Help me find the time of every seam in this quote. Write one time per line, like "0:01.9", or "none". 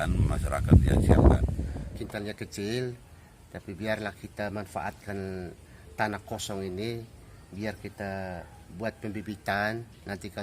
0:01.8